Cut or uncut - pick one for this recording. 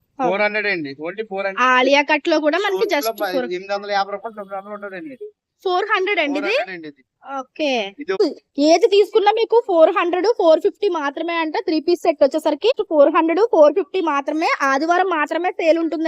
cut